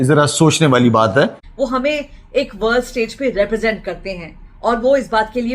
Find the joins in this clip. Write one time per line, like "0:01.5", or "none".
0:01.4